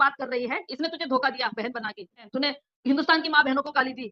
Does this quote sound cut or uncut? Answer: cut